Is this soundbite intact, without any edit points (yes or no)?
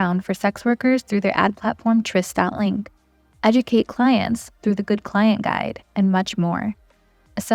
yes